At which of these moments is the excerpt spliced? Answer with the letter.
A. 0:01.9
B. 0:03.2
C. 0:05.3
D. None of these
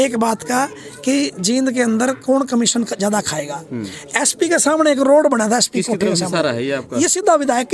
D